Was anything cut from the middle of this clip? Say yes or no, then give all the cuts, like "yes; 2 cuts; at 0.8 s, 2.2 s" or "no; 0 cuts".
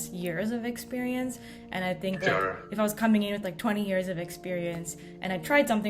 no; 0 cuts